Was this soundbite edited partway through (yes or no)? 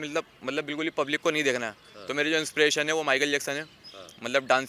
no